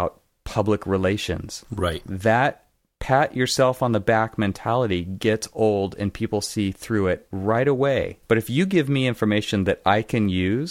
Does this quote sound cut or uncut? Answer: cut